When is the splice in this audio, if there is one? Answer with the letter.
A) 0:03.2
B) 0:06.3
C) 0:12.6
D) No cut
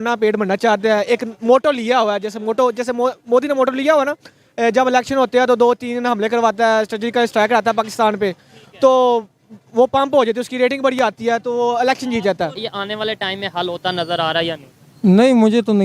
C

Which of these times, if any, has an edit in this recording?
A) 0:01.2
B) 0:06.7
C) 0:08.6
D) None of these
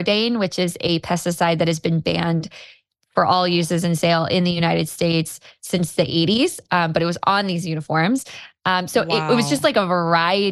D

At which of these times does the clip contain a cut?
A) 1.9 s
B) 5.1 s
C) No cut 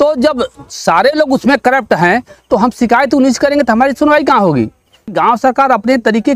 B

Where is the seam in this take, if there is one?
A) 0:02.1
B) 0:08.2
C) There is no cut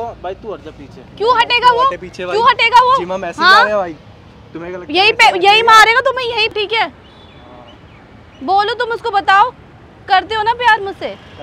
C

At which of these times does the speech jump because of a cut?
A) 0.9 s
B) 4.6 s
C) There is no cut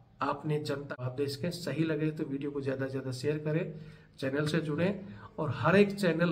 A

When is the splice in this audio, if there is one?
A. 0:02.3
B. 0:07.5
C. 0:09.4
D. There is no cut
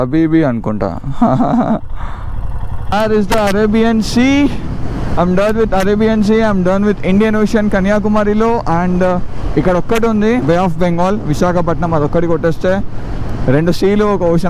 A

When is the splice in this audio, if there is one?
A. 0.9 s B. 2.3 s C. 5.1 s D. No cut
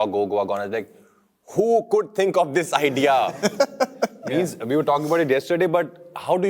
D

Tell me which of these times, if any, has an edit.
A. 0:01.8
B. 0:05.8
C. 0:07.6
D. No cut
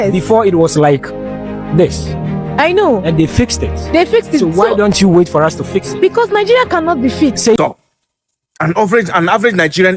C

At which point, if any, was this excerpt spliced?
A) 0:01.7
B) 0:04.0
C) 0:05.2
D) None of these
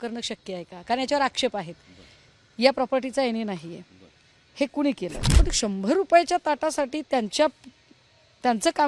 C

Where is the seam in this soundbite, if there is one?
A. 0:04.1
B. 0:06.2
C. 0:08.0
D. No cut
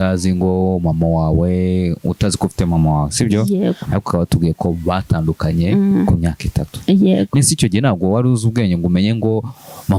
D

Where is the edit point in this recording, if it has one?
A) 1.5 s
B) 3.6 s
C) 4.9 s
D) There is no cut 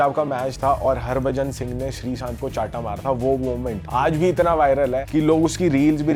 D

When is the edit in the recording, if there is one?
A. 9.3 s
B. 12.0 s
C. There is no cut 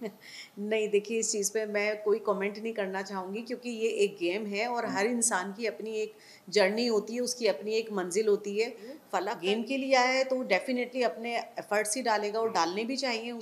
A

